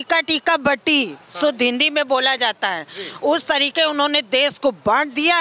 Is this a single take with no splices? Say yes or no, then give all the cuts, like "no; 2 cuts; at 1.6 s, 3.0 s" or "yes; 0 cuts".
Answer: yes; 0 cuts